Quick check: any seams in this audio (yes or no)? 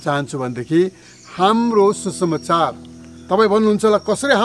yes